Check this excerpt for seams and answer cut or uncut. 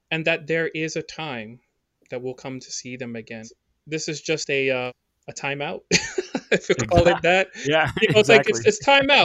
cut